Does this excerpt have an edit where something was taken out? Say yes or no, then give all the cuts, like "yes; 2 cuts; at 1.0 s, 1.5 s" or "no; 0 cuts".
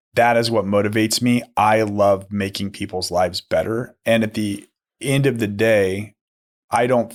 no; 0 cuts